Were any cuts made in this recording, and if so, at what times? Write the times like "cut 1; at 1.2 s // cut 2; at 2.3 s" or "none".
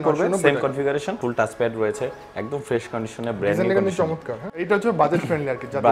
cut 1; at 1.1 s // cut 2; at 4.4 s